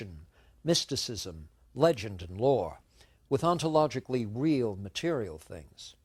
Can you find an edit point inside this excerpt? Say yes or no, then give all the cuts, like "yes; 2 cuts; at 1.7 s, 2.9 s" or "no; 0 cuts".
no; 0 cuts